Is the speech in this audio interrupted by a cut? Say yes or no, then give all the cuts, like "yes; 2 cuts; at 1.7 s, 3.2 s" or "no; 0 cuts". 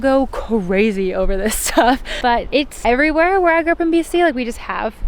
yes; 1 cut; at 2.5 s